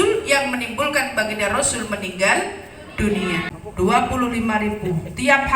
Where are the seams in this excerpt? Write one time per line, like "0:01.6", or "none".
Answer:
0:03.5